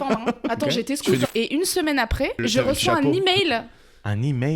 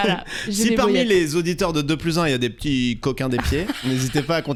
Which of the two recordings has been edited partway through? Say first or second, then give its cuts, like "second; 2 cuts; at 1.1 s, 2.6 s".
first; 2 cuts; at 1.3 s, 2.4 s